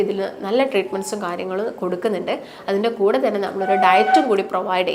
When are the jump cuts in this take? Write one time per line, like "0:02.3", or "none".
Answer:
none